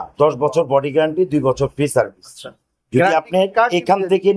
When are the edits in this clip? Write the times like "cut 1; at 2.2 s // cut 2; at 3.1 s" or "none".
none

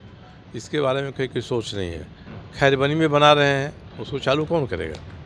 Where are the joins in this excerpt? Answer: none

